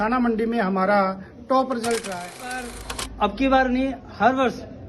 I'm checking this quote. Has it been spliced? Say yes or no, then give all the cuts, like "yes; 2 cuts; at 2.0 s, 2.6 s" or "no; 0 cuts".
yes; 1 cut; at 2.7 s